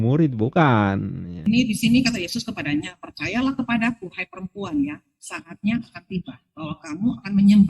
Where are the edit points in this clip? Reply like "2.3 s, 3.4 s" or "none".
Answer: 1.4 s